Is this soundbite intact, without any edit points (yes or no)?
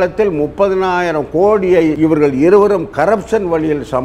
no